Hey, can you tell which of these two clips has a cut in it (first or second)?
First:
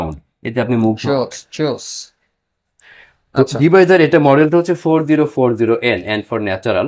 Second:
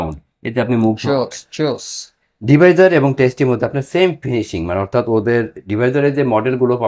second